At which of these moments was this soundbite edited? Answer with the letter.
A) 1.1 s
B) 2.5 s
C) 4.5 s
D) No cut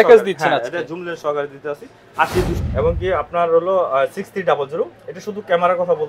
B